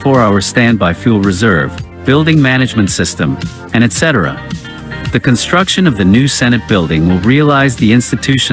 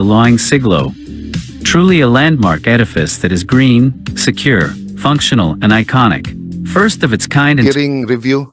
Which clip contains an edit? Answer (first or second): second